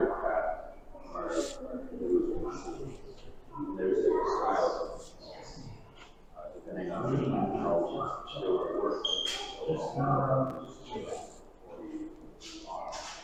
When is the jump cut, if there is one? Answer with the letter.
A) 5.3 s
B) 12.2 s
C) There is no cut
C